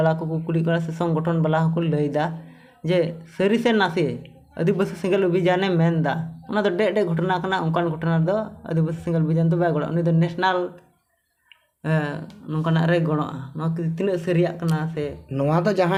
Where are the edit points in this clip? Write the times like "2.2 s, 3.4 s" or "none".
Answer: none